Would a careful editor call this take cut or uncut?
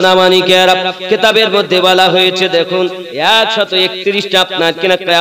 uncut